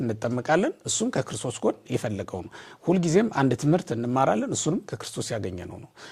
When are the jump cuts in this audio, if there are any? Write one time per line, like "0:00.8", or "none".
none